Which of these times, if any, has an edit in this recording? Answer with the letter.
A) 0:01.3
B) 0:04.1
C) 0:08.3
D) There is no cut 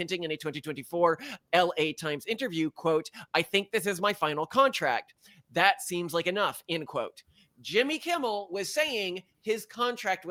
D